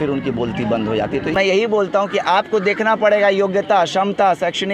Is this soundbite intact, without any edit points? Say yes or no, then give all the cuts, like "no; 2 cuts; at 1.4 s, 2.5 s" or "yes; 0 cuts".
no; 1 cut; at 1.3 s